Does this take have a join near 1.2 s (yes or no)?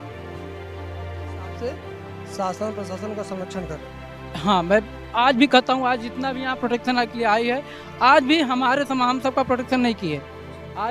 yes